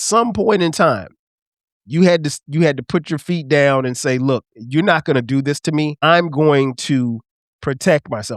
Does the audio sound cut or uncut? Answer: cut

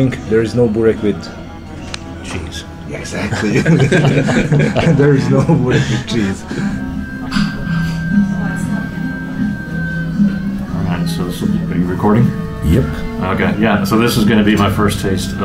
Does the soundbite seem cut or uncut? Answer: cut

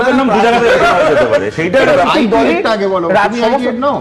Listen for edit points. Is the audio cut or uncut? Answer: cut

